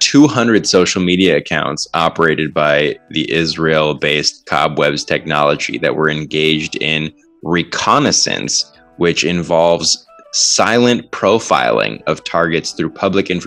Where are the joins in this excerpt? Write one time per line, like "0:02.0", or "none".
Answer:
none